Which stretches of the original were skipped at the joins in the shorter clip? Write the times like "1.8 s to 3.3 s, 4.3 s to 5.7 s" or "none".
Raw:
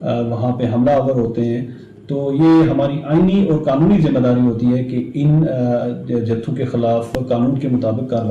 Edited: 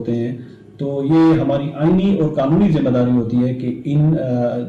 none